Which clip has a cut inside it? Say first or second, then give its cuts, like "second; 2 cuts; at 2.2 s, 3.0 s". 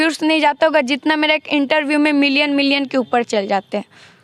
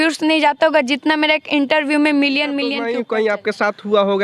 second; 1 cut; at 2.8 s